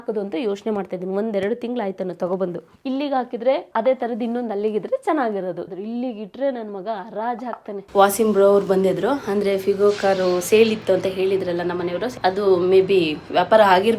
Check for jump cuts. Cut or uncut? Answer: cut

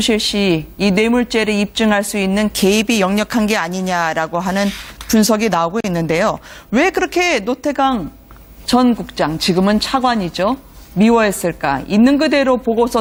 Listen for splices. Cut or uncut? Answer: uncut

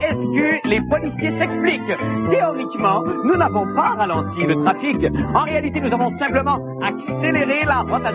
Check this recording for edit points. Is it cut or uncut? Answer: cut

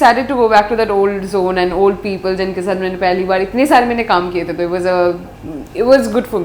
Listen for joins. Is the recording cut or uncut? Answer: uncut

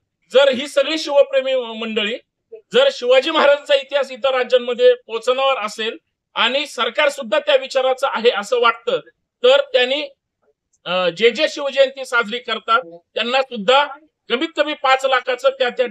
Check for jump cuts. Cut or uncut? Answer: uncut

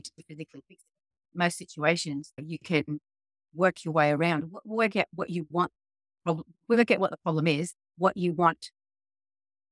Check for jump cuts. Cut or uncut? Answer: cut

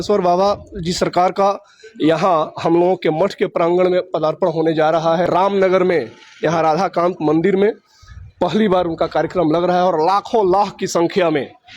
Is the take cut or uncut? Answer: cut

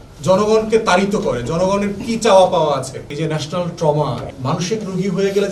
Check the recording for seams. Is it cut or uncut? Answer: cut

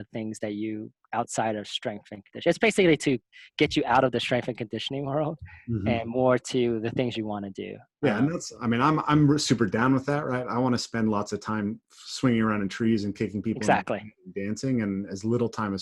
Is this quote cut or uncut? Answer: uncut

